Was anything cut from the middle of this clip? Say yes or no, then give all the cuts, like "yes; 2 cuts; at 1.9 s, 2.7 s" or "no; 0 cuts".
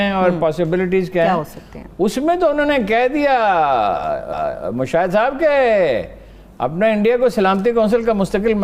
no; 0 cuts